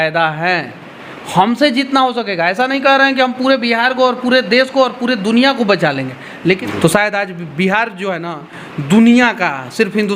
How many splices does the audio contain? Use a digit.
1